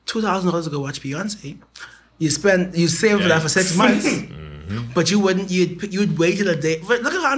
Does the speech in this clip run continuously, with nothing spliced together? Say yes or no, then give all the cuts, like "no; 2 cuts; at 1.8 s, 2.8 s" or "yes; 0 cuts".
yes; 0 cuts